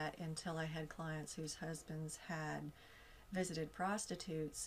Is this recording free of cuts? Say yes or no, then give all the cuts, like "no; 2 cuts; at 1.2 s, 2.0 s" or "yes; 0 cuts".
yes; 0 cuts